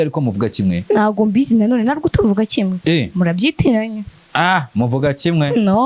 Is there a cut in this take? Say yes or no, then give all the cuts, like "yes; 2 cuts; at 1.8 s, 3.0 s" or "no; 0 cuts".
no; 0 cuts